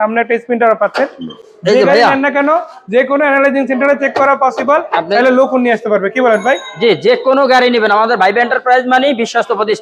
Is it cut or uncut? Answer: uncut